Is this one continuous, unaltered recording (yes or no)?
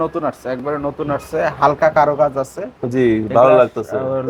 yes